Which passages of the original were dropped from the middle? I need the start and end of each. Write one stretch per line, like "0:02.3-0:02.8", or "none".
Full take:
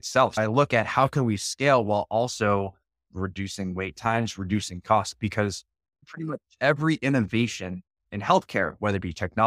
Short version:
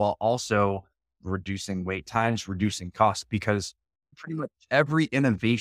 none